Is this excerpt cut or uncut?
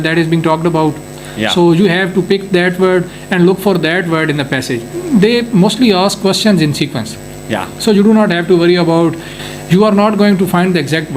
cut